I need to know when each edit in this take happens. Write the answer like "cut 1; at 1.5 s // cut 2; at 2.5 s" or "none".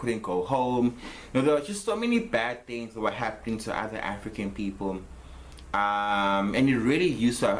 cut 1; at 1.1 s

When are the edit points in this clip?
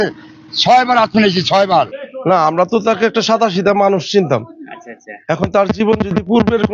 cut 1; at 1.9 s

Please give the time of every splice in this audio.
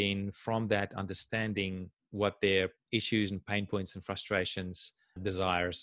cut 1; at 2.0 s // cut 2; at 2.8 s

